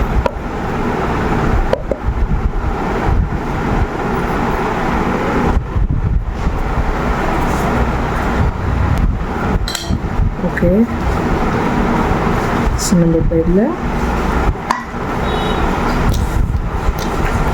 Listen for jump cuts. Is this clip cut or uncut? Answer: uncut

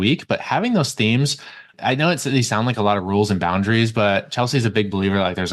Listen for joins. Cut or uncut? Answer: cut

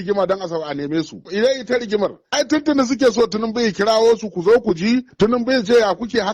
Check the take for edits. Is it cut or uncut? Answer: cut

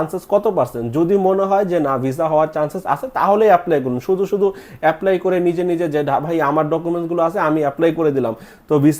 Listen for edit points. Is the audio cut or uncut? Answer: uncut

